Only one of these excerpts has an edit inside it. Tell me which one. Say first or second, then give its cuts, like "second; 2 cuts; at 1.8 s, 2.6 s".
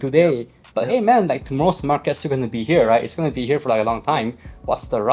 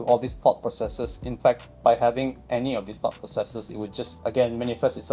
second; 3 cuts; at 1.7 s, 2.4 s, 4.1 s